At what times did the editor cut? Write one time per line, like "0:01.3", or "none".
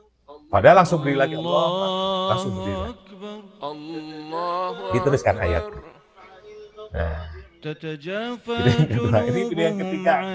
none

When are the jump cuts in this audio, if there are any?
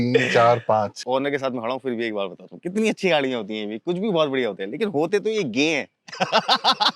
0:01.0

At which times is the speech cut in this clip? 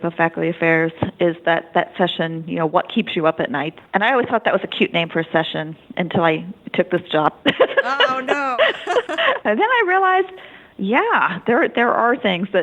0:03.8

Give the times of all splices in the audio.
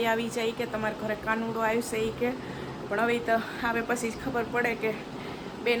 none

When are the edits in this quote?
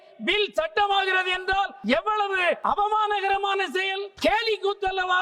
0:01.8
0:02.6
0:04.1

